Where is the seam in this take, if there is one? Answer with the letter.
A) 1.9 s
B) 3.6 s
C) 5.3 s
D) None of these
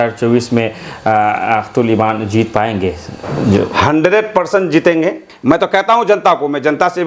C